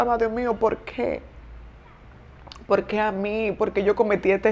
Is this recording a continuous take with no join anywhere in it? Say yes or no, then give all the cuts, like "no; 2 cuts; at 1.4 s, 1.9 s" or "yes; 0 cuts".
yes; 0 cuts